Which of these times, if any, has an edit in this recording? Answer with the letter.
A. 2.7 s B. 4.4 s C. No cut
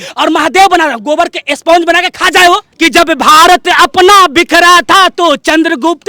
A